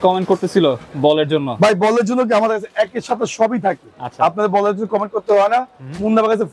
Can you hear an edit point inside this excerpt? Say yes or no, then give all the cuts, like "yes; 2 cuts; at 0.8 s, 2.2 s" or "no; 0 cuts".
no; 0 cuts